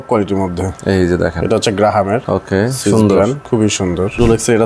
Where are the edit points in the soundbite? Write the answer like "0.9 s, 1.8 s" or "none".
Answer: 2.2 s, 3.8 s